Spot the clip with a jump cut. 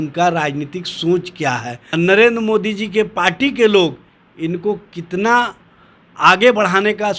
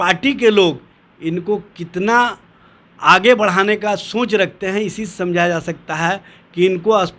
first; 1 cut; at 1.8 s

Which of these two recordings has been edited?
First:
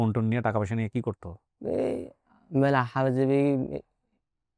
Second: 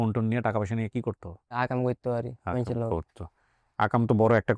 second; 1 cut; at 1.6 s

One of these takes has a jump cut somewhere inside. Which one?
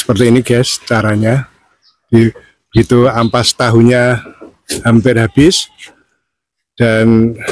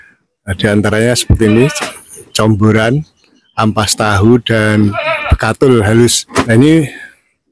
second; 1 cut; at 6.5 s

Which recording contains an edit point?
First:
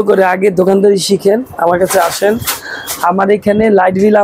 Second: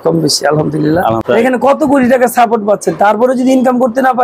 second; 1 cut; at 1.2 s

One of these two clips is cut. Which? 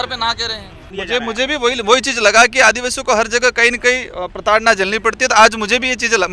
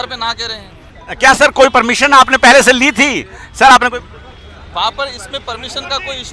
first; 1 cut; at 0.9 s

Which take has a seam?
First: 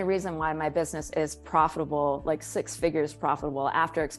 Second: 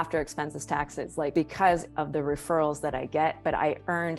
second; 1 cut; at 1.3 s

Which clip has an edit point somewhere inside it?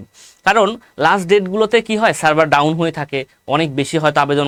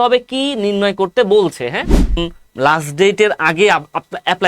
second; 1 cut; at 2.2 s

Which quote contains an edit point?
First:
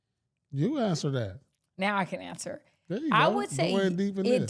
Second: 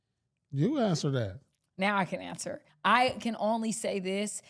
second; 1 cut; at 2.7 s

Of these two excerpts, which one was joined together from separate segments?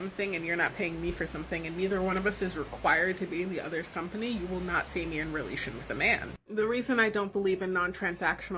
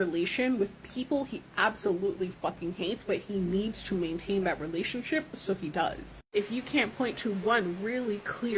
first; 1 cut; at 4.1 s

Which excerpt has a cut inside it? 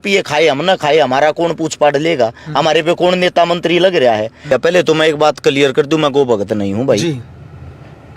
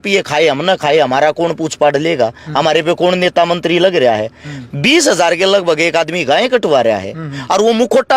first; 1 cut; at 4.5 s

